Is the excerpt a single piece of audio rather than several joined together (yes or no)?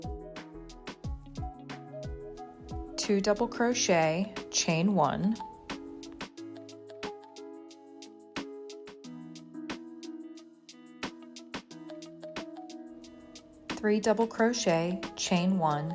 no